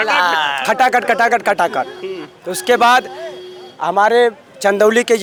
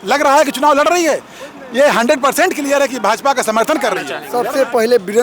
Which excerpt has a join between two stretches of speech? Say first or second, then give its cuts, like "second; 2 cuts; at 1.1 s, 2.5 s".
second; 1 cut; at 4.2 s